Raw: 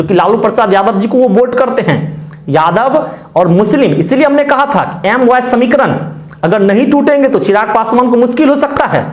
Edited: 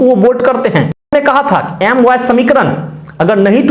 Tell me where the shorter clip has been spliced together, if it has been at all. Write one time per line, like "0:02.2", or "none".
0:01.1